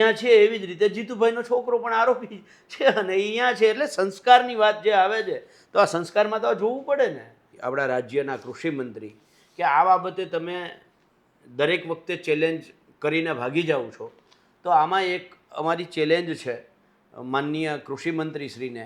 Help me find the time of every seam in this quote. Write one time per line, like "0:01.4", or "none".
0:07.5